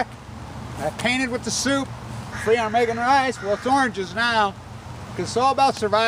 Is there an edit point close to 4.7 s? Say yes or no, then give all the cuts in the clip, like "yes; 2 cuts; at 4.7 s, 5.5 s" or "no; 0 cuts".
no; 0 cuts